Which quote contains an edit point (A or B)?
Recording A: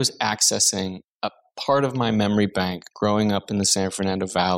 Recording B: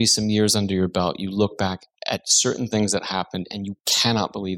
A